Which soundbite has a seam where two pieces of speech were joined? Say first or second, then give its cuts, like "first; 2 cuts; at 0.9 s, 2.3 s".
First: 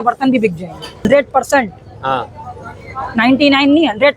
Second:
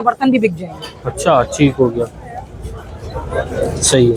first; 1 cut; at 1.0 s